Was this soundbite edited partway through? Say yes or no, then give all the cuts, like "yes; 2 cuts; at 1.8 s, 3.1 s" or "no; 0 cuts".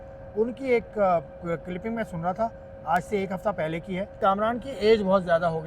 yes; 1 cut; at 4.1 s